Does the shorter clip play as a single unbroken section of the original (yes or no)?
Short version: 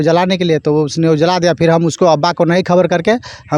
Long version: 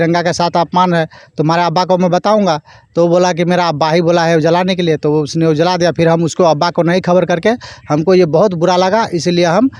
yes